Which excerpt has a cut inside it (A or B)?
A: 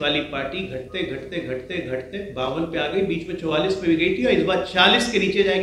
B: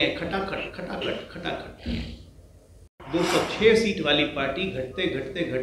B